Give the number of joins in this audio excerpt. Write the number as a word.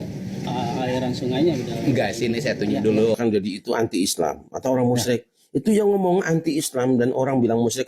one